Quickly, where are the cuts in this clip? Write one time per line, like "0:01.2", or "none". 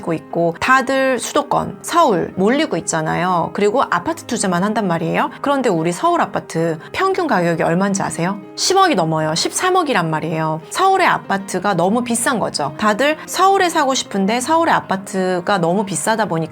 0:02.3

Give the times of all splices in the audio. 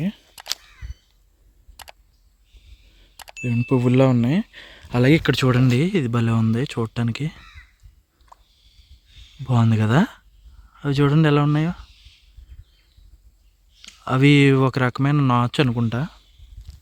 none

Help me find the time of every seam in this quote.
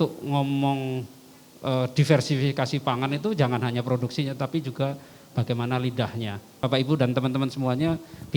0:06.6

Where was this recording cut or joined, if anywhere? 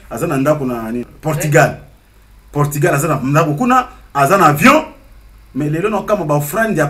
0:01.1

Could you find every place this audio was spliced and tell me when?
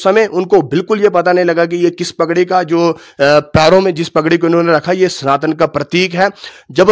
none

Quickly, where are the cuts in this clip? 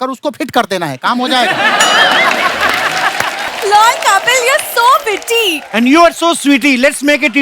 0:03.5

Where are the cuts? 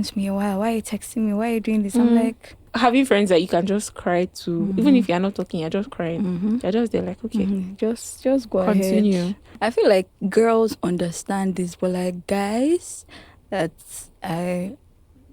0:02.6
0:09.5

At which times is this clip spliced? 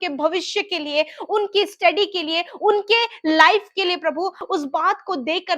0:04.4

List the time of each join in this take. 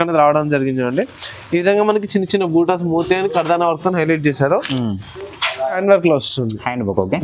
0:05.8

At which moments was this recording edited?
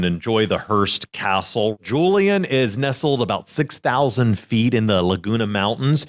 0:01.8

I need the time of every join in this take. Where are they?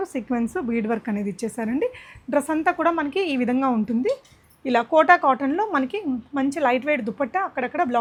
none

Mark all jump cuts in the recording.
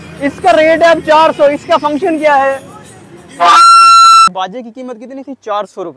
0:04.3

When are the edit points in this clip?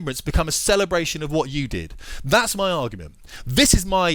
none

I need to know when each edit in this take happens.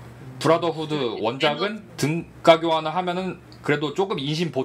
0:01.8

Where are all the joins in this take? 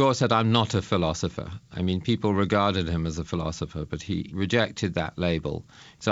0:01.6
0:04.1

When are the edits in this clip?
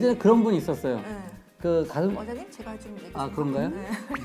none

